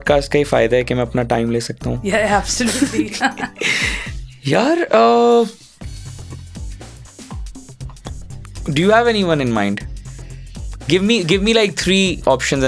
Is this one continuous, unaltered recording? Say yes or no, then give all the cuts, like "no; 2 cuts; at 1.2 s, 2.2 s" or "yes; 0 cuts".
yes; 0 cuts